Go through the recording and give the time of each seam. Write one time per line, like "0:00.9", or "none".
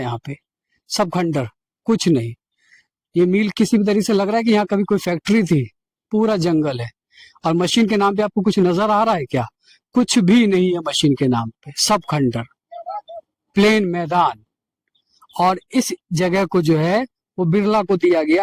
none